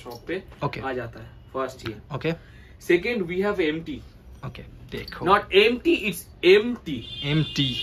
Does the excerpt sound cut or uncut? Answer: uncut